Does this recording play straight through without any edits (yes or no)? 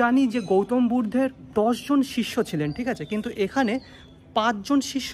no